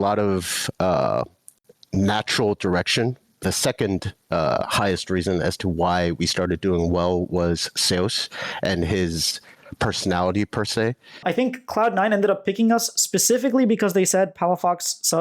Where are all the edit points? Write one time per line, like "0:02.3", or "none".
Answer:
0:03.4
0:11.2